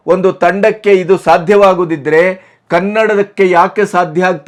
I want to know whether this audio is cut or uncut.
uncut